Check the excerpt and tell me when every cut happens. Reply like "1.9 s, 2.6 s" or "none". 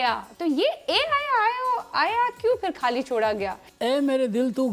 3.7 s